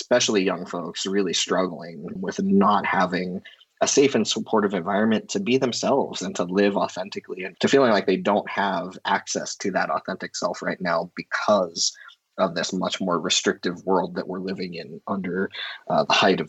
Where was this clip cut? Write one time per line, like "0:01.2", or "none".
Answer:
none